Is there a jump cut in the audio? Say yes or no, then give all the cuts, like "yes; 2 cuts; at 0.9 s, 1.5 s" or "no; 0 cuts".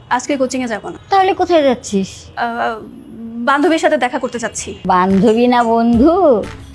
yes; 3 cuts; at 0.9 s, 2.2 s, 4.7 s